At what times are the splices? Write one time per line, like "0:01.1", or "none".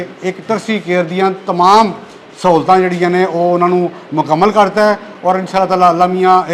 none